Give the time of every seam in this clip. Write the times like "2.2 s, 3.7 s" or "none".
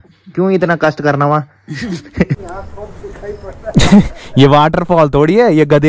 2.4 s